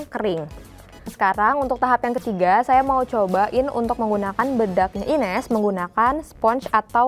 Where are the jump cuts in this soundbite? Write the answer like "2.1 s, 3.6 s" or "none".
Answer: 1.1 s